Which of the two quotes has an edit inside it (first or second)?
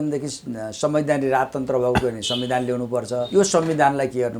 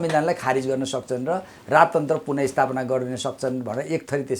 first